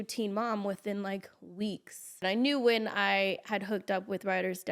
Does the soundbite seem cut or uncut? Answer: cut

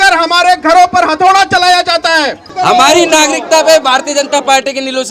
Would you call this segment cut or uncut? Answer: cut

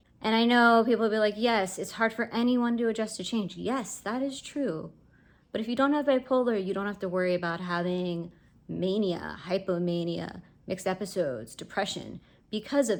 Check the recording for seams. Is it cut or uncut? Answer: uncut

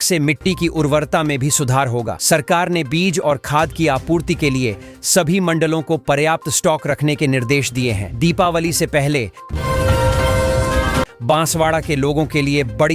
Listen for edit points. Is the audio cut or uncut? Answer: cut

